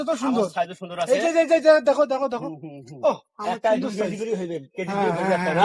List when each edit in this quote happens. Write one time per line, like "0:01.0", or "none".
none